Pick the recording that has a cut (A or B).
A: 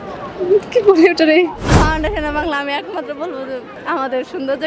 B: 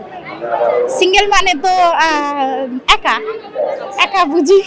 A